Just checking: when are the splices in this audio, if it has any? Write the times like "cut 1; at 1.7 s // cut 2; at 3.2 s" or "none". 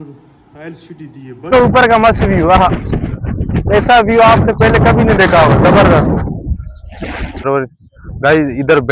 cut 1; at 1.5 s // cut 2; at 7.5 s